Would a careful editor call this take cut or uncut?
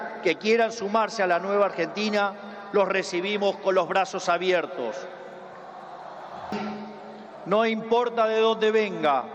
cut